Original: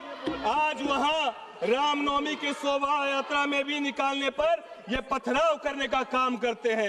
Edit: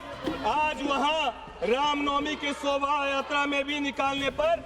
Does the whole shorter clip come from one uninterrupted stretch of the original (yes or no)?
yes